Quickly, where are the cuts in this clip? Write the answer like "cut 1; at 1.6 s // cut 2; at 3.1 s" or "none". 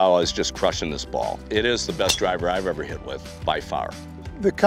none

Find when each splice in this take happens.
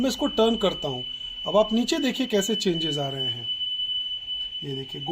none

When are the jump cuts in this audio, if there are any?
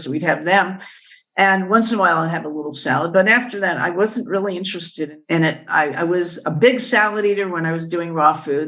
cut 1; at 5.1 s

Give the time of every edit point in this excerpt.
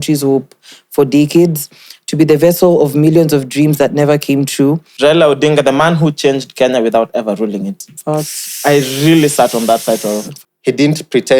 cut 1; at 4.9 s // cut 2; at 10.3 s

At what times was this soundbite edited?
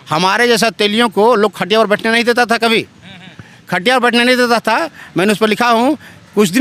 none

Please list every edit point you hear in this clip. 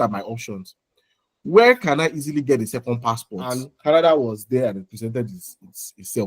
cut 1; at 3.6 s

